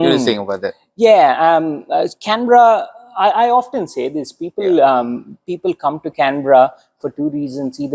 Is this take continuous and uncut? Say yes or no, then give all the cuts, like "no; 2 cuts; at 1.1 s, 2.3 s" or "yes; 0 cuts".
yes; 0 cuts